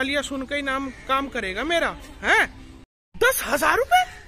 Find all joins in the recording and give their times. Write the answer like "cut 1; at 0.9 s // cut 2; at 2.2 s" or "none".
cut 1; at 2.7 s